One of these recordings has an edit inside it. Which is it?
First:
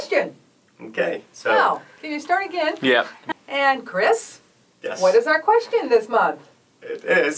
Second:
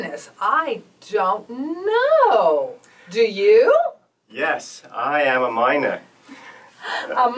first; 1 cut; at 3.2 s

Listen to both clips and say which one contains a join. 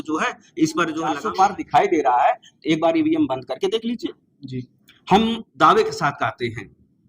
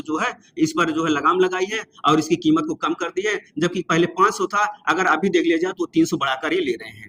first; 1 cut; at 1.2 s

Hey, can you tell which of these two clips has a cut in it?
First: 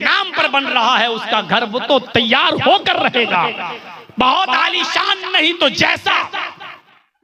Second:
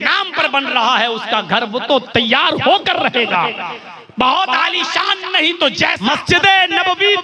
second; 1 cut; at 6.1 s

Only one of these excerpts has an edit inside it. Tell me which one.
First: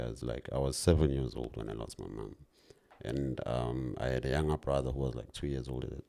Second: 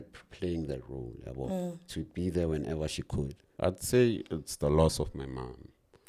second; 1 cut; at 3.4 s

